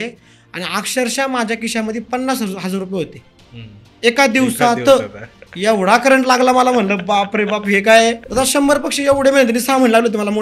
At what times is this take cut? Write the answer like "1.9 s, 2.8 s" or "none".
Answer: 8.2 s